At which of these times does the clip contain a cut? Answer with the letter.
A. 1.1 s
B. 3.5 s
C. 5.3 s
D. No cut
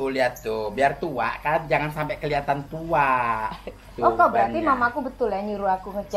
B